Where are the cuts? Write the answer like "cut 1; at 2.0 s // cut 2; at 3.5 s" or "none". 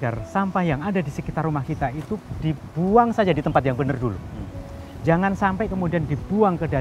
none